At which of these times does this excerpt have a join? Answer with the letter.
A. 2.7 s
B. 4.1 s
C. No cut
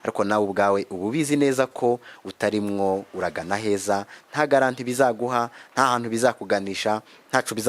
C